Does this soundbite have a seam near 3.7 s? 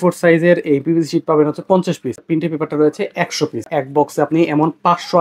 yes; 2 cuts; at 2.2 s, 3.7 s

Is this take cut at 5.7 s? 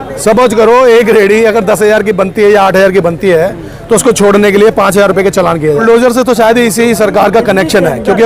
yes; 1 cut; at 5.7 s

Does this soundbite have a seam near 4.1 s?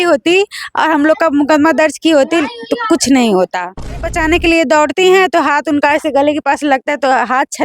yes; 1 cut; at 4.1 s

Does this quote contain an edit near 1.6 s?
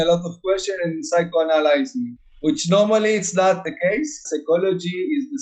no; 1 cut; at 3.9 s

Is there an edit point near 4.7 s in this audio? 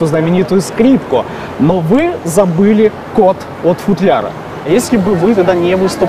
yes; 1 cut; at 4.7 s

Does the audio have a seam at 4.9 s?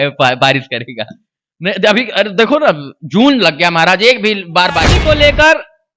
yes; 1 cut; at 4.9 s

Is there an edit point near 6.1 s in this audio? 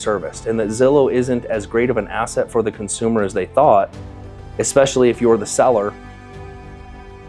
no; 0 cuts

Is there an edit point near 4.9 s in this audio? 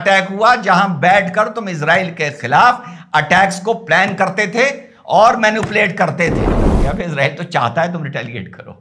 no; 1 cut; at 6.5 s

